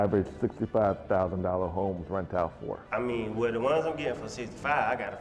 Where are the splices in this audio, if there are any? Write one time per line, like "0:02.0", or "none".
0:02.8